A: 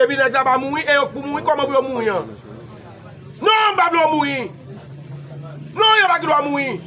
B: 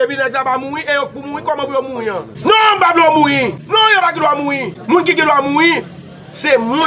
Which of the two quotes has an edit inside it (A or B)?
B